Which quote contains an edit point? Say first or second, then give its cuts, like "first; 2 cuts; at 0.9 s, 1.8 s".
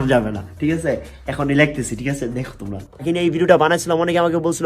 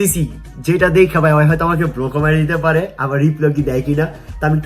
first; 1 cut; at 3.0 s